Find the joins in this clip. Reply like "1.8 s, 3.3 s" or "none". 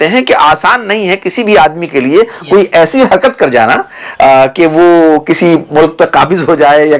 none